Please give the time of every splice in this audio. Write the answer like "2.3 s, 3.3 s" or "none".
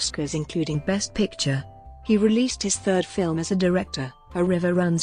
1.3 s